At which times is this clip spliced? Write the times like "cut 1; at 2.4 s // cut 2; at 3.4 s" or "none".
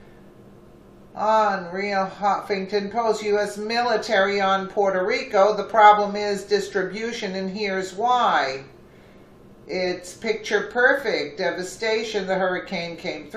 cut 1; at 1.7 s